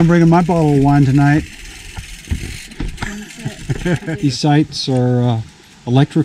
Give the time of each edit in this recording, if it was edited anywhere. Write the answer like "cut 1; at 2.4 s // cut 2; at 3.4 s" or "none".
cut 1; at 4.1 s